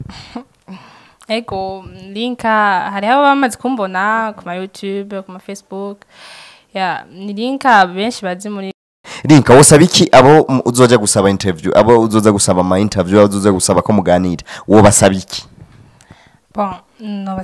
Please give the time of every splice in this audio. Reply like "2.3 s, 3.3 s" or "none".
9.1 s